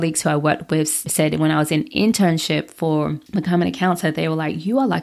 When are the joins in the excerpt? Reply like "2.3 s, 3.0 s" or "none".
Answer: 1.0 s